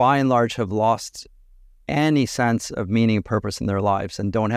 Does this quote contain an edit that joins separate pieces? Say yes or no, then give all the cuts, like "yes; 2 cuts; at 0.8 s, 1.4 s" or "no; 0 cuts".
no; 0 cuts